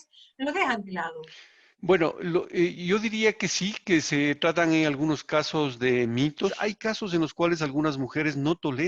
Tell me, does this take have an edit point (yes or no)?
yes